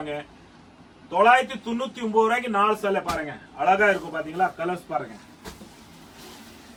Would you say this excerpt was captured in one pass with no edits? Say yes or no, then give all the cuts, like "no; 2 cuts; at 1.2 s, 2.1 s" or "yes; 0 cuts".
yes; 0 cuts